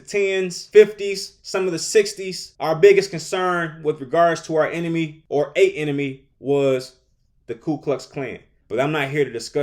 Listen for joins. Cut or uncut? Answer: cut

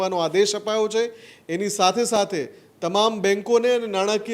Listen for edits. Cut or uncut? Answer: uncut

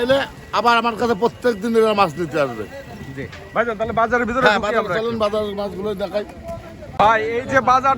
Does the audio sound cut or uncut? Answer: uncut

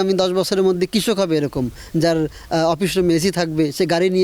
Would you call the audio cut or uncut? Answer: uncut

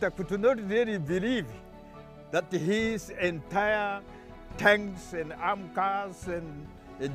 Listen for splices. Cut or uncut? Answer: uncut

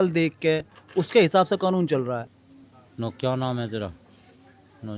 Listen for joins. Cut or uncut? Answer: cut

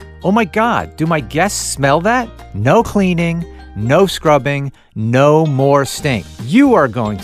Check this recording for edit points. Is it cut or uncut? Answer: cut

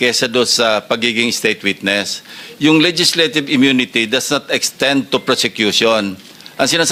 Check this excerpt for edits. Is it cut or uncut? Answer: uncut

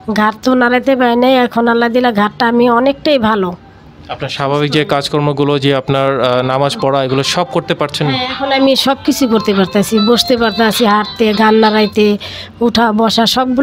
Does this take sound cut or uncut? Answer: uncut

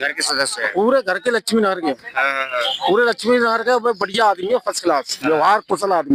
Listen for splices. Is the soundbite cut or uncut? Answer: uncut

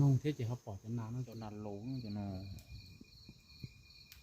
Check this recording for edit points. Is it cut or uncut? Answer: cut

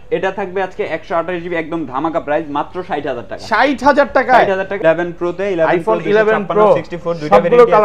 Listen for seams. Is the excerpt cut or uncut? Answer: cut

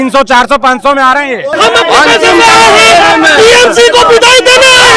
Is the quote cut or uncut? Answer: cut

